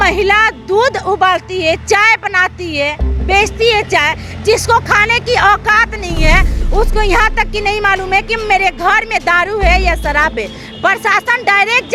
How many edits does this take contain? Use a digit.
0